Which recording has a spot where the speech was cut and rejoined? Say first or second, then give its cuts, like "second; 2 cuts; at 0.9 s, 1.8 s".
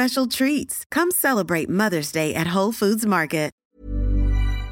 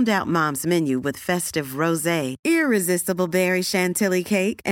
first; 1 cut; at 3.6 s